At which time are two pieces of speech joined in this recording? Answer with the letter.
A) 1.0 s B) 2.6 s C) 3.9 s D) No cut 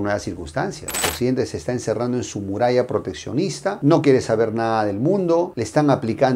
A